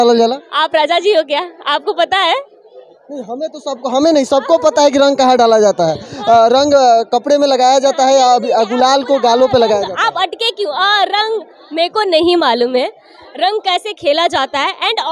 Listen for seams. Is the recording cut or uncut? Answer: uncut